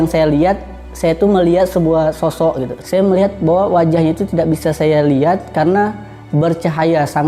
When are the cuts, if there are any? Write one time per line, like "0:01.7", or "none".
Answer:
0:02.7